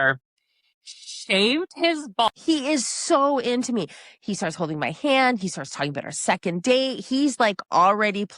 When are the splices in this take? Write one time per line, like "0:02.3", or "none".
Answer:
0:02.3